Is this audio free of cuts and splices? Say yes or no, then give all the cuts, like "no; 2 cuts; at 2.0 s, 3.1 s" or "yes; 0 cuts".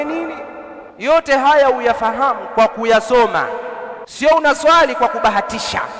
no; 2 cuts; at 1.1 s, 4.1 s